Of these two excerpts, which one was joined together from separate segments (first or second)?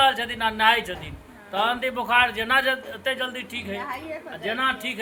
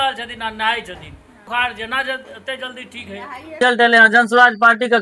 second